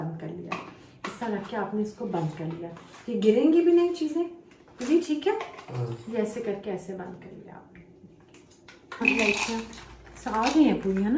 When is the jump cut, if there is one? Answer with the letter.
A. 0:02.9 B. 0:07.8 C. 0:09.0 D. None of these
C